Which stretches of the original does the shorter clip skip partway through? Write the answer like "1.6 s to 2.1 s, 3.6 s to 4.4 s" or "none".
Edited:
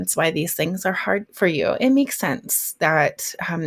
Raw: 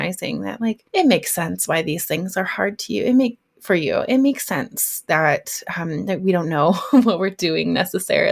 2.8 s to 3.6 s